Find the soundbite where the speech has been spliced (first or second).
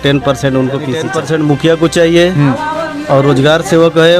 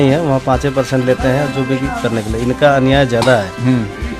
first